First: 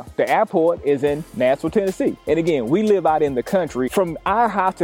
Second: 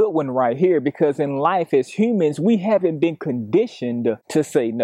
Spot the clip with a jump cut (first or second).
first